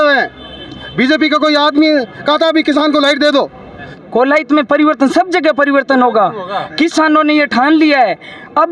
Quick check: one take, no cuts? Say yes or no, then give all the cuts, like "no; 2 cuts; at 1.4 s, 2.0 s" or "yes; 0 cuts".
no; 1 cut; at 3.9 s